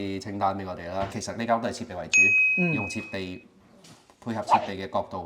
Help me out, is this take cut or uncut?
cut